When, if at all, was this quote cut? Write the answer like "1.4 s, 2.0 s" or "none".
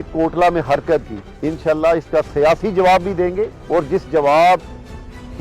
none